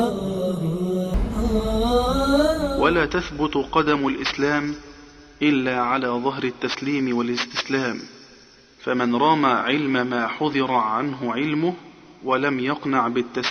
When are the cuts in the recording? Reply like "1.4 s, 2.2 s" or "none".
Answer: 1.1 s